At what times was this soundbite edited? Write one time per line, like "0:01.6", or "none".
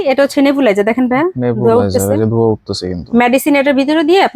none